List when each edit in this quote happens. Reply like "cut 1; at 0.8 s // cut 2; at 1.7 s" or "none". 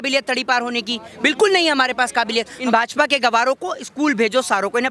cut 1; at 2.5 s

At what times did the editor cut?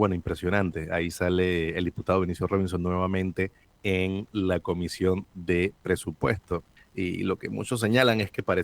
cut 1; at 3.7 s // cut 2; at 6.8 s

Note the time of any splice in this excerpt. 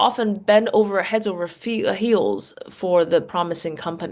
none

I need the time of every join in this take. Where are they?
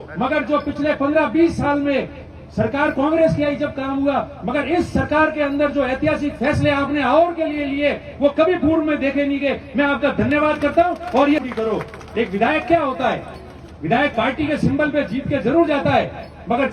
cut 1; at 11.4 s

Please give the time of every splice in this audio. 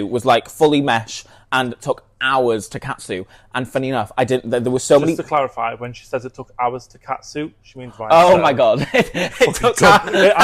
none

